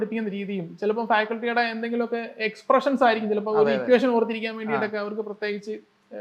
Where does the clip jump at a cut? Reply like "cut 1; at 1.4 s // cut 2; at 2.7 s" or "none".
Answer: none

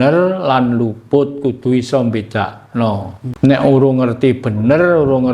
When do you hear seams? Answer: cut 1; at 3.2 s

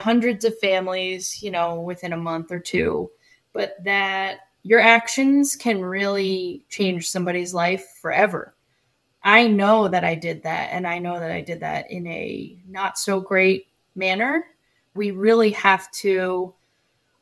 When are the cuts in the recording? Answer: cut 1; at 14.9 s

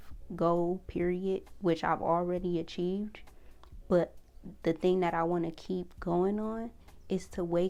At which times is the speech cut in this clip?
none

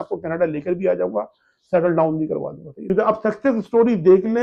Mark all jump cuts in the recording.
cut 1; at 2.9 s

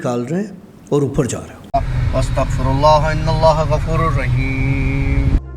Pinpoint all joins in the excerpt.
cut 1; at 1.7 s

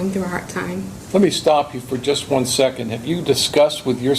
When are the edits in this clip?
cut 1; at 1.0 s

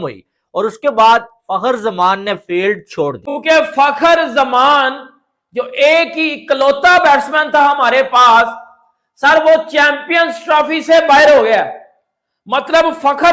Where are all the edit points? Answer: cut 1; at 3.3 s

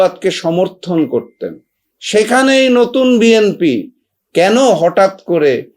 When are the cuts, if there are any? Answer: none

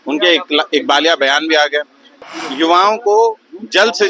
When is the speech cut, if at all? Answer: cut 1; at 2.1 s

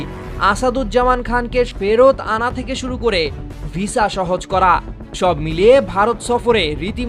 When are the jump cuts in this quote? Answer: cut 1; at 1.7 s

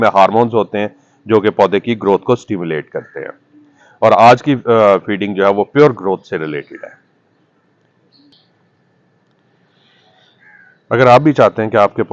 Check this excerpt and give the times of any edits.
none

